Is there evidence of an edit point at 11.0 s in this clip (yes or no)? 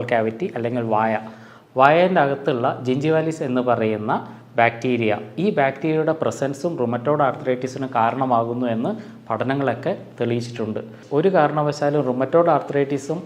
yes